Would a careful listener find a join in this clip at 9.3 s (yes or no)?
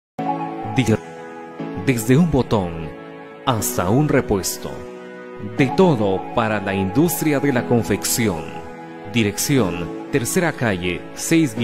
no